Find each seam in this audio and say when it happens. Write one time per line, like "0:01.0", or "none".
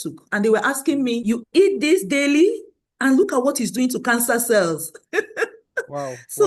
0:01.2